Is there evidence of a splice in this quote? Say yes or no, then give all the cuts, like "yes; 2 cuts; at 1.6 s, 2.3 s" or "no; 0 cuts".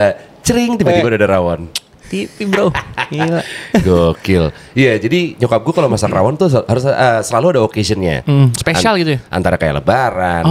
no; 0 cuts